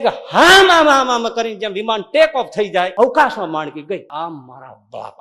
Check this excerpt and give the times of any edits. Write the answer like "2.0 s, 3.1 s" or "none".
2.9 s, 4.1 s